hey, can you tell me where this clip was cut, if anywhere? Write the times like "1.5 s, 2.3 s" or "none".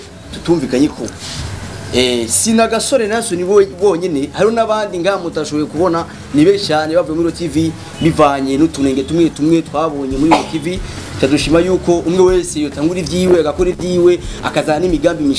none